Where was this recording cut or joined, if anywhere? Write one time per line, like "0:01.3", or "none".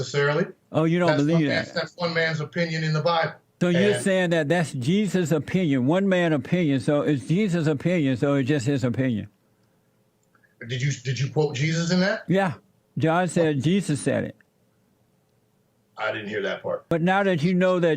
0:03.4
0:16.9